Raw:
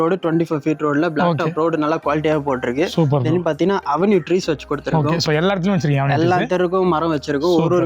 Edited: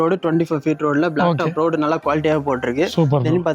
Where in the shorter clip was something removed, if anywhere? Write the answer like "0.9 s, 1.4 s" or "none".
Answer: none